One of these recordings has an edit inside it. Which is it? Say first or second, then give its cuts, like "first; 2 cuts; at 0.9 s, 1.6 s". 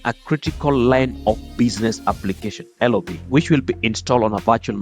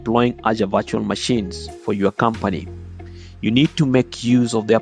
first; 2 cuts; at 1.2 s, 3.2 s